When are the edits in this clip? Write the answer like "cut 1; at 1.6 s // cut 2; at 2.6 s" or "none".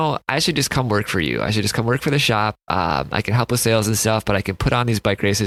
none